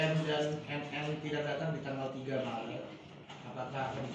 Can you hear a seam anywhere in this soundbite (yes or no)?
no